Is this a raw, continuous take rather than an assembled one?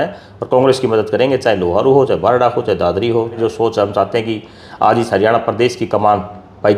no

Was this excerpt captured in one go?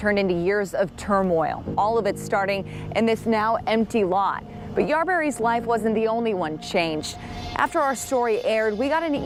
yes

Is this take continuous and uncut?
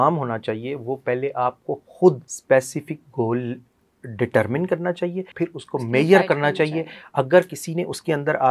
no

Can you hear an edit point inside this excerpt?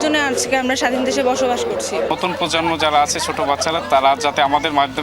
yes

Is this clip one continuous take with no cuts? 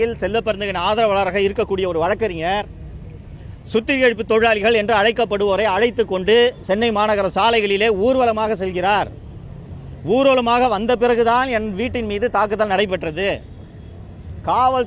yes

